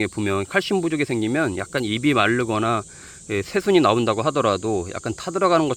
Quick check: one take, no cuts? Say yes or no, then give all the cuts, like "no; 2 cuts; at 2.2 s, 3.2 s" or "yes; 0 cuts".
yes; 0 cuts